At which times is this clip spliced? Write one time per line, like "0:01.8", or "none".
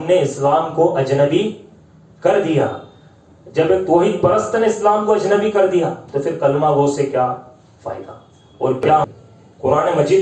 0:09.1

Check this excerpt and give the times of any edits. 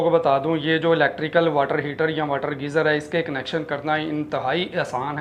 none

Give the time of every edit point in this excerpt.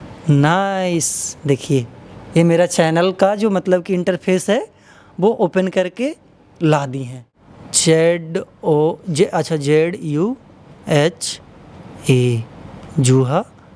0:07.5

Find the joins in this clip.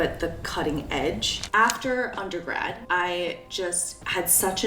0:01.4
0:02.8
0:03.7

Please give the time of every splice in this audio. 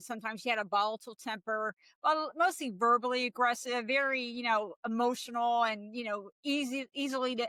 none

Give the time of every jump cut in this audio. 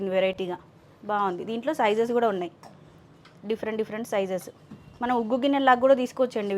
none

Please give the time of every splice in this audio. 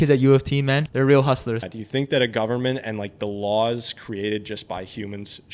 0:00.9
0:01.7

